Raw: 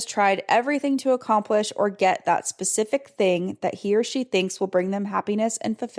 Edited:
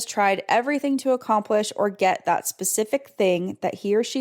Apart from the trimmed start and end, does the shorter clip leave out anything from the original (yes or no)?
no